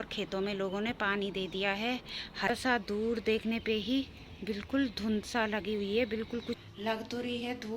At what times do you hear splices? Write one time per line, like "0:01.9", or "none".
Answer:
0:02.5
0:06.6